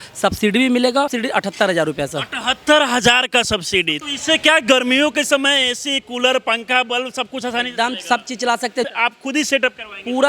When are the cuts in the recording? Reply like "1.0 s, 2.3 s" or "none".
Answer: 1.1 s, 4.0 s, 8.9 s